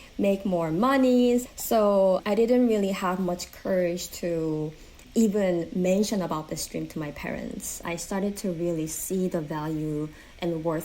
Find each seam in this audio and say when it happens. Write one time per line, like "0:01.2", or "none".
0:01.9
0:05.0
0:07.8